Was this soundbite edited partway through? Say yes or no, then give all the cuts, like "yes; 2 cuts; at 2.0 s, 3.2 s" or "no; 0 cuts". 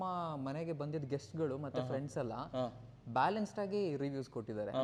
no; 0 cuts